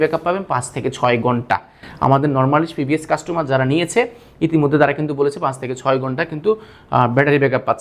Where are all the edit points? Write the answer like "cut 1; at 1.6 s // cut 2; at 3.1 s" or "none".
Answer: none